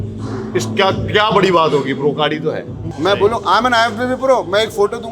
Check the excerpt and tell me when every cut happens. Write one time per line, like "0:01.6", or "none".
0:02.8